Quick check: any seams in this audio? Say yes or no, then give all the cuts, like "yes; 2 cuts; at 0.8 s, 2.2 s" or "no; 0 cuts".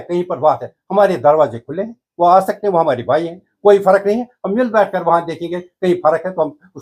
no; 0 cuts